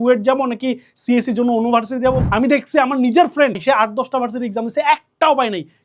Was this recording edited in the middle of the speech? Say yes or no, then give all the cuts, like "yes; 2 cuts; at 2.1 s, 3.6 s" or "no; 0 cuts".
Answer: yes; 2 cuts; at 2.2 s, 3.6 s